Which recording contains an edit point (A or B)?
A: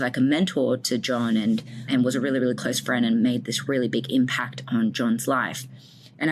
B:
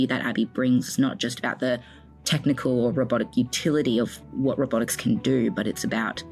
A